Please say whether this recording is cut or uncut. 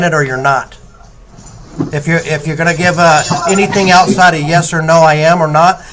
uncut